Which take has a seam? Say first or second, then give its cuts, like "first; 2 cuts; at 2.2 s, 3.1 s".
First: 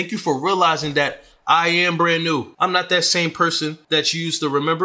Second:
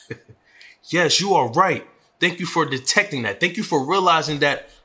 first; 2 cuts; at 2.5 s, 3.8 s